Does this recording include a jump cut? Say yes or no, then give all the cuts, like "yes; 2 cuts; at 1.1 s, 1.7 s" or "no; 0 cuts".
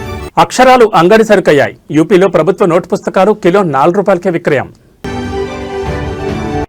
no; 0 cuts